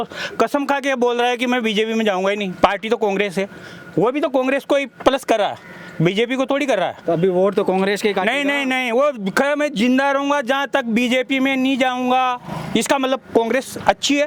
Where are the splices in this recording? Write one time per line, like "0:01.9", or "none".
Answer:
none